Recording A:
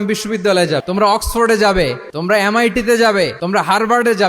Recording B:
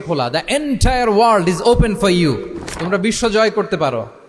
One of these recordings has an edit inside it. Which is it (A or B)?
A